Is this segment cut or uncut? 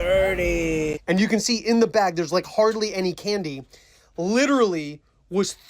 cut